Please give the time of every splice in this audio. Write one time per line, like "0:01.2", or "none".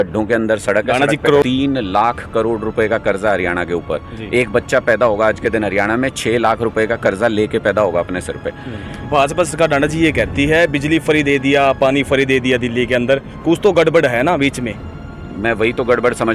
0:01.4
0:08.9